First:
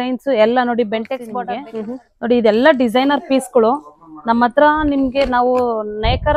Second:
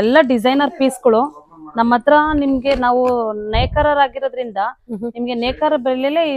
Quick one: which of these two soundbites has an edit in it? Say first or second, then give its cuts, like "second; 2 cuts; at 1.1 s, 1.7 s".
first; 1 cut; at 1.3 s